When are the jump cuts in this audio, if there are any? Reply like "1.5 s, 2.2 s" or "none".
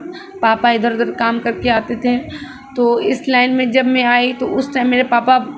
none